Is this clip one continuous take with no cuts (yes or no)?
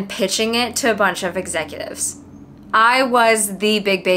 yes